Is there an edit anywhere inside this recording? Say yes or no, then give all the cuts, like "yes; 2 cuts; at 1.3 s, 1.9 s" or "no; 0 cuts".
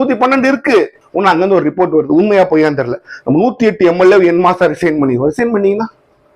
yes; 1 cut; at 1.0 s